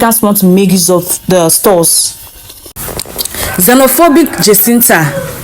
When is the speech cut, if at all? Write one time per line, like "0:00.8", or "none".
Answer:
0:02.8